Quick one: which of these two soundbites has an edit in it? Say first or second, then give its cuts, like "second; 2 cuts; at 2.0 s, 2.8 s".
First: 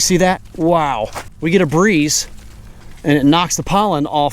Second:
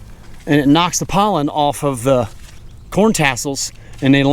first; 1 cut; at 1.3 s